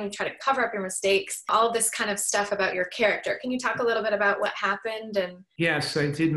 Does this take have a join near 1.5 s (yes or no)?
yes